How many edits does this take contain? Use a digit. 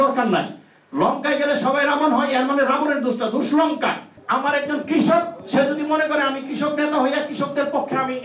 1